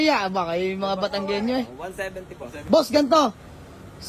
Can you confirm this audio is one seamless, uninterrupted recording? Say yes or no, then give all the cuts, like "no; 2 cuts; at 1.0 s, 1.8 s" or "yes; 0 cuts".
no; 1 cut; at 2.5 s